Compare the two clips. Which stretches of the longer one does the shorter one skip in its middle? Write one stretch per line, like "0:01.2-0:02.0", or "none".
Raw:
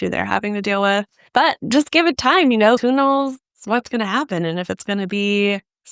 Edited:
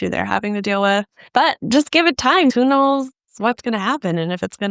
0:02.5-0:02.8